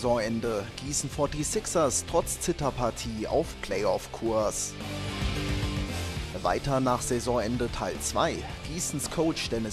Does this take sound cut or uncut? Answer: uncut